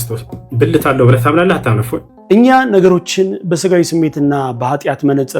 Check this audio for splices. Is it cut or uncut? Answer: cut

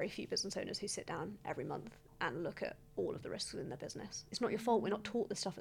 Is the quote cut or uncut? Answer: cut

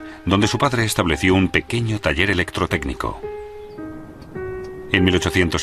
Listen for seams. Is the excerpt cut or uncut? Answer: uncut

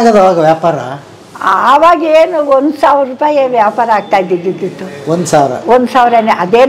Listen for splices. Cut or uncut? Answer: uncut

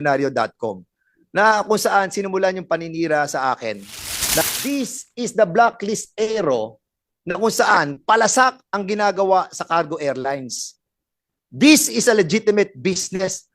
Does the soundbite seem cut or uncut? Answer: cut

